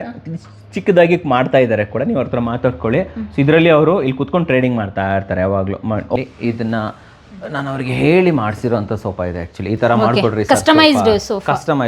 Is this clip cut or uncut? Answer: cut